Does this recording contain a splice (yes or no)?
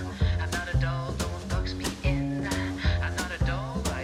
no